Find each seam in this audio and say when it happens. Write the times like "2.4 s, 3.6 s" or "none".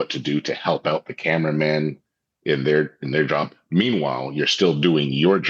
none